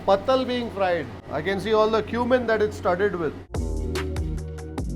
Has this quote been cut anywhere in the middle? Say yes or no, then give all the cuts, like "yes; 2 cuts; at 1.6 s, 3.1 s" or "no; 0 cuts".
yes; 2 cuts; at 1.3 s, 3.4 s